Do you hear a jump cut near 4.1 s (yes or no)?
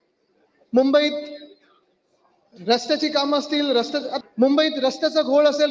yes